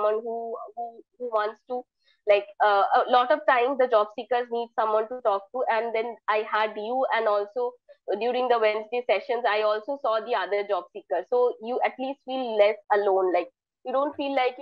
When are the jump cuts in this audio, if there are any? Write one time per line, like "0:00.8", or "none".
none